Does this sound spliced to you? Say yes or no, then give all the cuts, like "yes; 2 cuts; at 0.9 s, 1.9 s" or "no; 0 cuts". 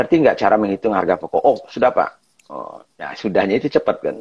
no; 0 cuts